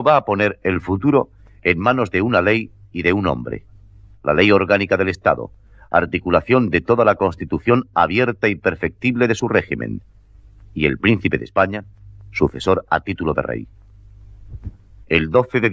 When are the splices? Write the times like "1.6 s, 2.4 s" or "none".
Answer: none